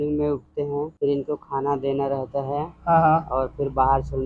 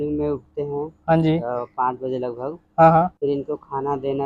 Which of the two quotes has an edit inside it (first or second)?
first